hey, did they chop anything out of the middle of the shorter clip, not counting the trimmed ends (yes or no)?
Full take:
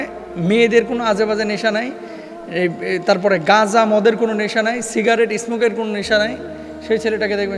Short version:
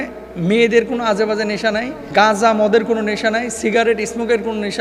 yes